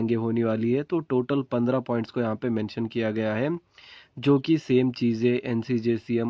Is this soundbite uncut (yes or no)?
no